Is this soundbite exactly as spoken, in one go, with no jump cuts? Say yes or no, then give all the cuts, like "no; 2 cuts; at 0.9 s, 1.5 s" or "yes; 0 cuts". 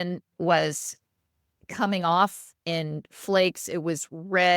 yes; 0 cuts